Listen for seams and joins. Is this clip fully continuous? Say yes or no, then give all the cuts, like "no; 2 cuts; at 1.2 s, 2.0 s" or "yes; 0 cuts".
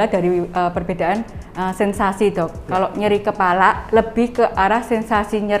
yes; 0 cuts